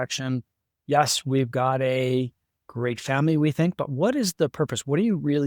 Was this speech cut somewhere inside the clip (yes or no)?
no